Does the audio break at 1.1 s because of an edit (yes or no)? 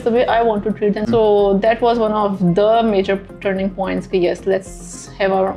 yes